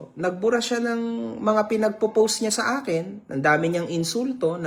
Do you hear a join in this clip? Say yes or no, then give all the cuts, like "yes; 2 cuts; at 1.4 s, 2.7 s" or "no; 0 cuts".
no; 0 cuts